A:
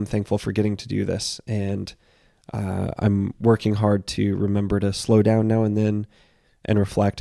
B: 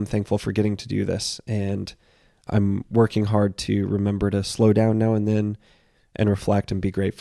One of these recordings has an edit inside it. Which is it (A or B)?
B